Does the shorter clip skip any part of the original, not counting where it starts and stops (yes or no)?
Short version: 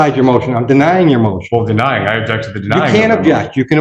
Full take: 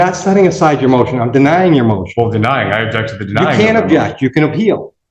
no